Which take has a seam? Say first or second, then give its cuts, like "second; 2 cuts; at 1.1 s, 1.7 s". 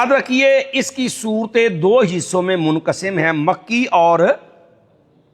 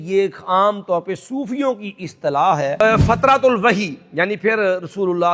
second; 1 cut; at 2.8 s